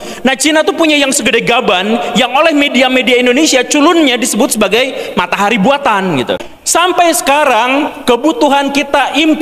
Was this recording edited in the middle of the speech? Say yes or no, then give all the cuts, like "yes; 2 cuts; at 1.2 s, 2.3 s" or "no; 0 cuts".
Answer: yes; 1 cut; at 6.5 s